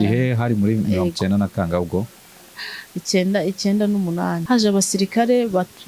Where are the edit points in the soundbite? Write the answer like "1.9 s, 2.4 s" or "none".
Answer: 4.4 s